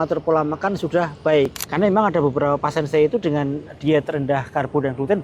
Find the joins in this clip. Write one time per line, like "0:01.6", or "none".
0:01.6